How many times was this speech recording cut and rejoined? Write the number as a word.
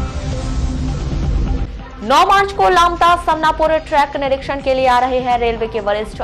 zero